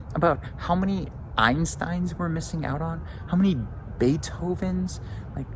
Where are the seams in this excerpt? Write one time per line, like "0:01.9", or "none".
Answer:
none